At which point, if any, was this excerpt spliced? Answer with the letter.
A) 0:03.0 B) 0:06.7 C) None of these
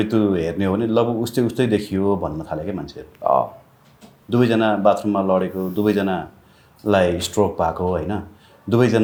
C